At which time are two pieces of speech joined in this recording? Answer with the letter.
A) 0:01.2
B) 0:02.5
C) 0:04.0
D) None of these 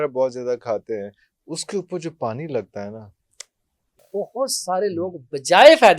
C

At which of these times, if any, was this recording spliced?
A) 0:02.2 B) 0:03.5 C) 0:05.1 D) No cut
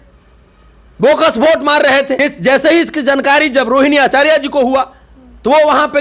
A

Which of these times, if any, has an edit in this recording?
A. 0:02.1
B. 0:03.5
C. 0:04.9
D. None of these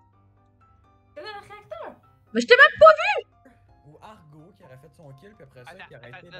B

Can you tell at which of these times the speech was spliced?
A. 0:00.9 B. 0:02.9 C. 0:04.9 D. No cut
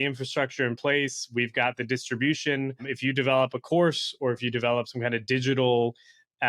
B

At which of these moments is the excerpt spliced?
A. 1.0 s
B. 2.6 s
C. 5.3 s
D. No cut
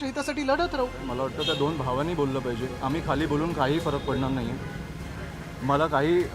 A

